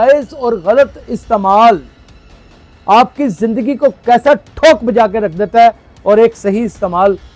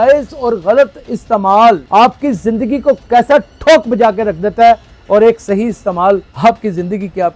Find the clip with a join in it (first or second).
second